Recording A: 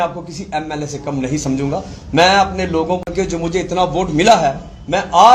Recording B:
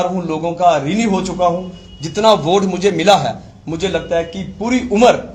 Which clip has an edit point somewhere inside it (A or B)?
A